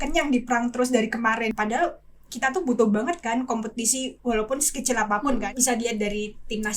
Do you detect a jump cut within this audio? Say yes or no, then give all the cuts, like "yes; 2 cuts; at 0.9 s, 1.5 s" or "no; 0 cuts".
yes; 2 cuts; at 1.5 s, 5.4 s